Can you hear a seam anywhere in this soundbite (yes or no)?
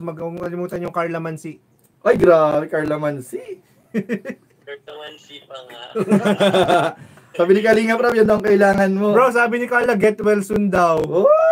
no